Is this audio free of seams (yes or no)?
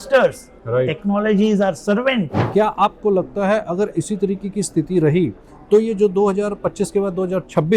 no